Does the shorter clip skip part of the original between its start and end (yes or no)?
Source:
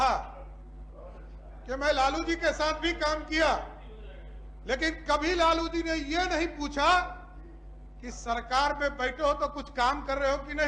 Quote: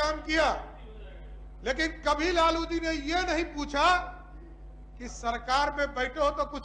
no